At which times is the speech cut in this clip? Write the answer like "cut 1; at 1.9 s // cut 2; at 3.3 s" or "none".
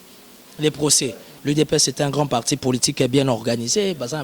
cut 1; at 1.3 s

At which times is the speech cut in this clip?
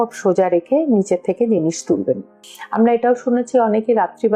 cut 1; at 2.3 s

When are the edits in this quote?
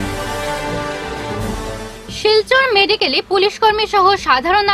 cut 1; at 1.3 s

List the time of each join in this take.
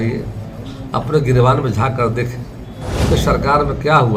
cut 1; at 3.0 s

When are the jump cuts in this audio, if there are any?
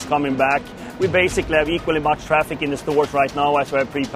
none

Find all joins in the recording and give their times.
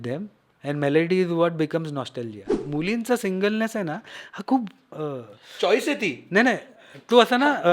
cut 1; at 2.6 s

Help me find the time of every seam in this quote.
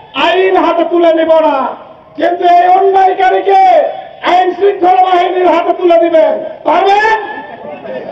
none

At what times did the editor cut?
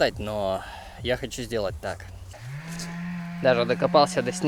cut 1; at 2.3 s

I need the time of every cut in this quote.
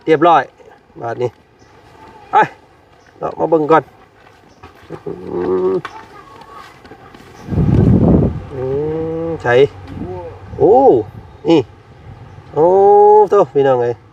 cut 1; at 7.5 s

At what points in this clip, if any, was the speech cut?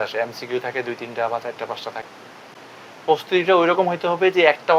cut 1; at 2.0 s

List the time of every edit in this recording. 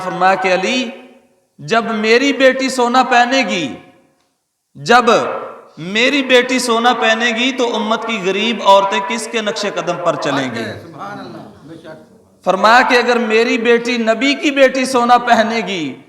none

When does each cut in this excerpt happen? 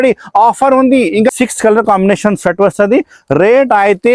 cut 1; at 1.3 s

